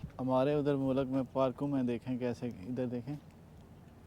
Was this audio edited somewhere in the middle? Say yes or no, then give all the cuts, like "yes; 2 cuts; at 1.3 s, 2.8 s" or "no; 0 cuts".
no; 0 cuts